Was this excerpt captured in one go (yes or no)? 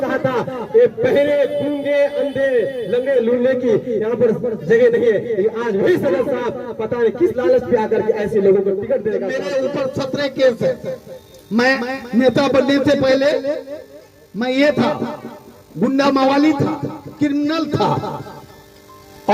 no